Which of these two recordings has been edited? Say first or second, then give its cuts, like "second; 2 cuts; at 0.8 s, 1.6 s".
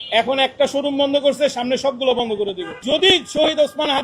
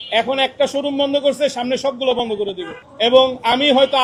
first; 1 cut; at 2.8 s